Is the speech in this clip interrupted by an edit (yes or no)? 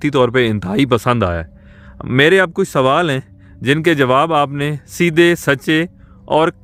no